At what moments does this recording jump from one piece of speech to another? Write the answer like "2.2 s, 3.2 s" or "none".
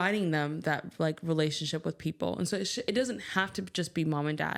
none

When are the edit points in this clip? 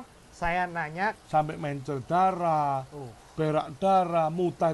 1.1 s

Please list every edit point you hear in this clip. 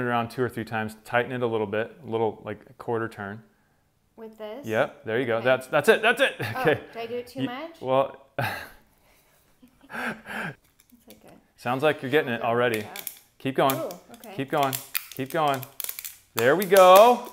8.3 s, 10.5 s

